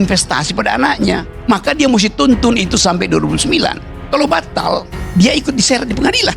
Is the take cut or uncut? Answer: cut